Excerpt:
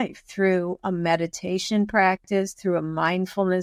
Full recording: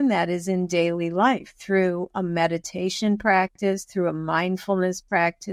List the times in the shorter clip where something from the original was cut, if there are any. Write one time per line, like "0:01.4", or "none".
none